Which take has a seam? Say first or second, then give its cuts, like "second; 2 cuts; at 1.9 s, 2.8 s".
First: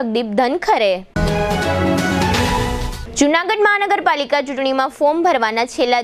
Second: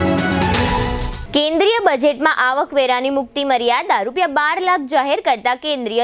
second; 1 cut; at 0.9 s